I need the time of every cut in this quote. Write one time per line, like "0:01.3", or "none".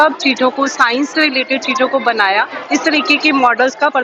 0:02.6